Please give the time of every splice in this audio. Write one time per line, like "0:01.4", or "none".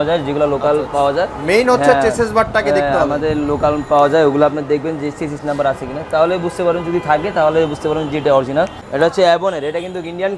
0:08.8